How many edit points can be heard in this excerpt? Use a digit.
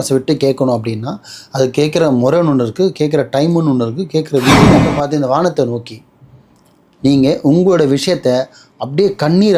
1